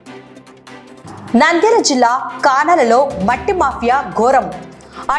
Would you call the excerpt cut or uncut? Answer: cut